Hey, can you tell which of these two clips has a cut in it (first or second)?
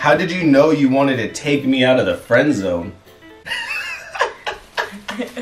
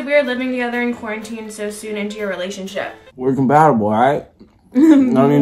second